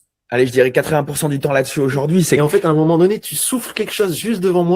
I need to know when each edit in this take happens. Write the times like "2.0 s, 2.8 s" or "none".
2.4 s

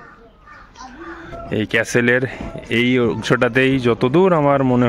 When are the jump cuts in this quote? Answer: 1.3 s

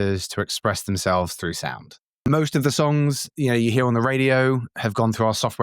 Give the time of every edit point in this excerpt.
2.2 s, 4.7 s

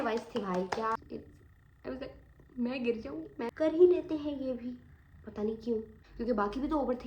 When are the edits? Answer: 1.0 s, 3.5 s, 5.9 s

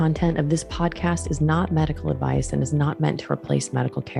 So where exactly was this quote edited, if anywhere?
none

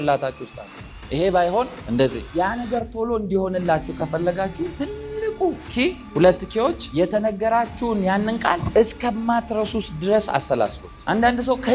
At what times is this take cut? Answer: 2.2 s

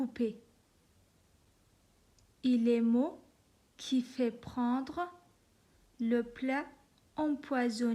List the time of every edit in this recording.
1.5 s

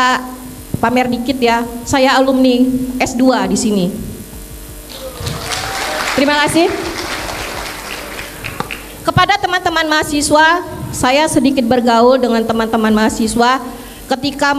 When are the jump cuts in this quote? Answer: none

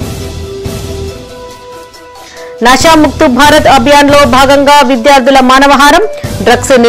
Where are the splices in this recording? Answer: 2.2 s

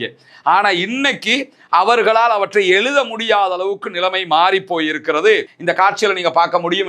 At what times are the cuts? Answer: 5.5 s

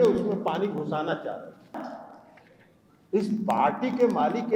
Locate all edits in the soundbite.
1.7 s

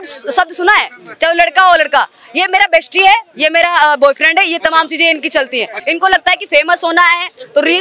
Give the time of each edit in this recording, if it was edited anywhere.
5.8 s

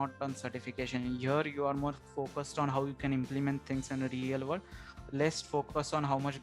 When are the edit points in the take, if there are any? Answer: none

